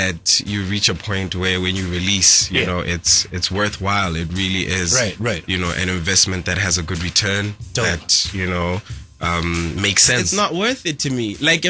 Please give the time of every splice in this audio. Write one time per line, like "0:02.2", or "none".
0:10.2